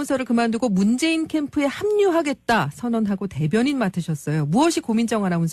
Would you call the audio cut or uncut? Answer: uncut